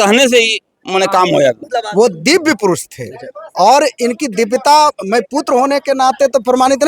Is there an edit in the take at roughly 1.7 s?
yes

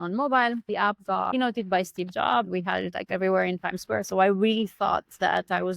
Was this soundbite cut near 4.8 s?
no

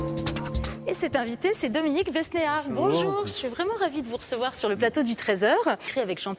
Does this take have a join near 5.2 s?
yes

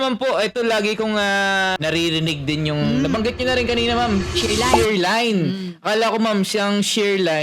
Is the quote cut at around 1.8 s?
yes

